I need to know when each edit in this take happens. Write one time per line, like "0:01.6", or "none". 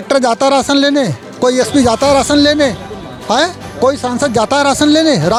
none